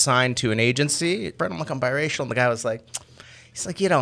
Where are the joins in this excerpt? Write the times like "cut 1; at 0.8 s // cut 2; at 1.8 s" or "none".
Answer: cut 1; at 1.3 s